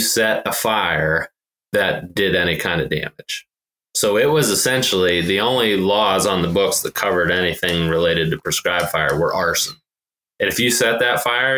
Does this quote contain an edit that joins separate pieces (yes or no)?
no